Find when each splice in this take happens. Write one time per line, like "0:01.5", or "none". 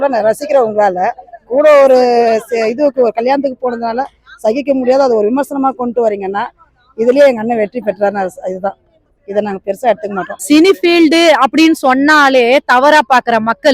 0:09.0
0:10.3